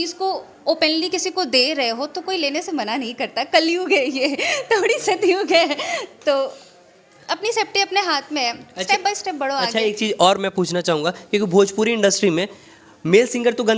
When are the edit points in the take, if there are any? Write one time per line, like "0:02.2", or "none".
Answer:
none